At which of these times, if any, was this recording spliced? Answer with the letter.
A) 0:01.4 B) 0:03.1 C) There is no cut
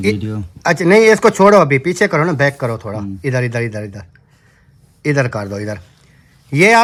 C